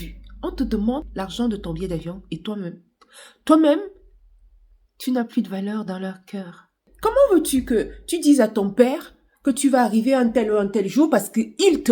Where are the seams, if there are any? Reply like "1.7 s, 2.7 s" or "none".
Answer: 1.0 s, 6.9 s